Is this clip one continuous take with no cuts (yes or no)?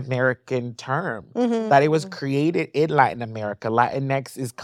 yes